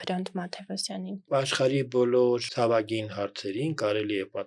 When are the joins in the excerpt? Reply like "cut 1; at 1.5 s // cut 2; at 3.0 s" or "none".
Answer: cut 1; at 1.3 s // cut 2; at 2.5 s